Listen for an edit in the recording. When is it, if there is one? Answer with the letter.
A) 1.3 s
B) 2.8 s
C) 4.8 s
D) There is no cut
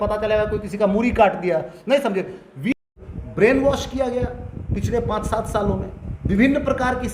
B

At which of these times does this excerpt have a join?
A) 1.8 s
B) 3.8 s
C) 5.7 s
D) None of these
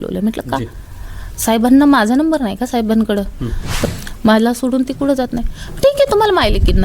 B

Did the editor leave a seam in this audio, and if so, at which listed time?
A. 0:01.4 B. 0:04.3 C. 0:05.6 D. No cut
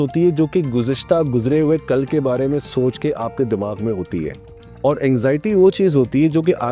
D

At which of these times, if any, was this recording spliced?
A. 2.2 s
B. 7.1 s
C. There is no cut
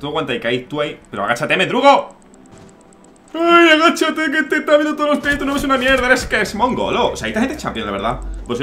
C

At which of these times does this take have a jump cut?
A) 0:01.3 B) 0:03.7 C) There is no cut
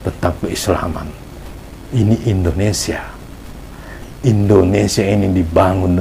C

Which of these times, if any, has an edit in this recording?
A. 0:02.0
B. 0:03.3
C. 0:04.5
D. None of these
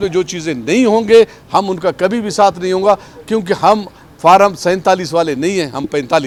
D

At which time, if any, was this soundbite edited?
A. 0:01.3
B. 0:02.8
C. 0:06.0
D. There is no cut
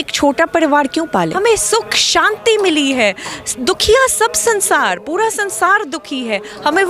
A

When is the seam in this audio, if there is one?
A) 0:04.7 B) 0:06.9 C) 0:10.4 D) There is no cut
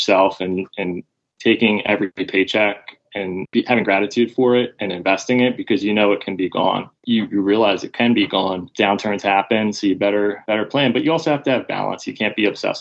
B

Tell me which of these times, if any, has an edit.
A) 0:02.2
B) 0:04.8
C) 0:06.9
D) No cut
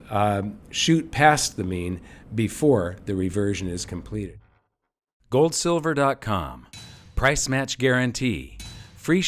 B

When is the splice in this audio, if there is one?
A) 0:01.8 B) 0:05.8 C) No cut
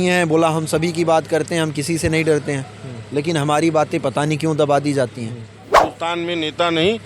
B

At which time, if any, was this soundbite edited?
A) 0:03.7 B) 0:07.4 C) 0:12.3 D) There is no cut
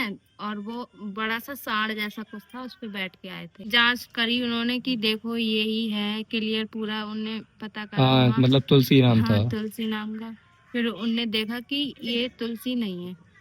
A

